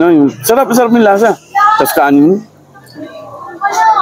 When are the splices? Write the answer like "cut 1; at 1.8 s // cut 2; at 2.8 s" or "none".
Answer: none